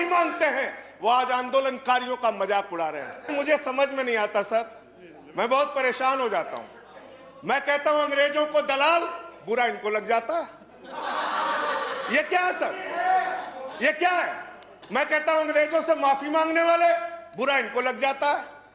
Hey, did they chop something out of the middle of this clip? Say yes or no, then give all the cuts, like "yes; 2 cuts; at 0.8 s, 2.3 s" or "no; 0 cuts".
yes; 1 cut; at 3.3 s